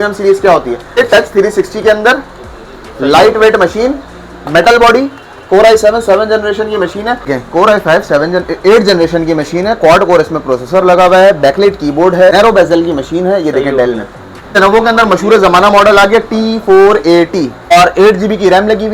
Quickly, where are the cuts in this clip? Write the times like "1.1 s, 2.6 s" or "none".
1.0 s, 7.3 s, 12.3 s, 14.6 s, 17.7 s